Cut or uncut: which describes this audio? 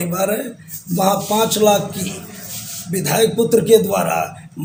uncut